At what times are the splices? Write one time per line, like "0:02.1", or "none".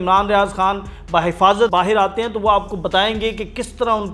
0:01.7